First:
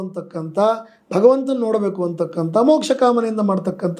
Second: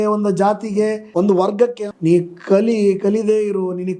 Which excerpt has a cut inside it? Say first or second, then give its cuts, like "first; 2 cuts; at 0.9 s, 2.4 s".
second; 2 cuts; at 1.0 s, 1.8 s